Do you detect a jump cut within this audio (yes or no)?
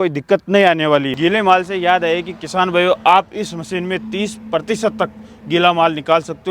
yes